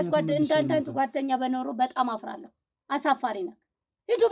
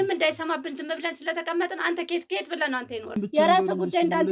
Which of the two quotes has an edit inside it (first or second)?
second